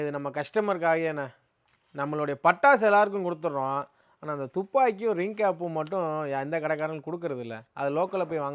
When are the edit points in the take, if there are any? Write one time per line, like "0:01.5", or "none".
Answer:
none